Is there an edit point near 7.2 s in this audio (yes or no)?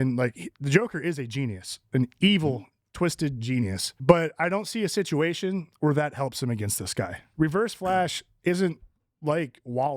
yes